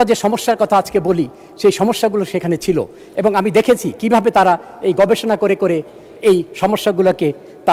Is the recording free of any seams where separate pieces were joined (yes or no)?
yes